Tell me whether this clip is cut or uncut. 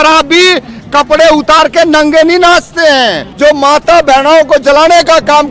cut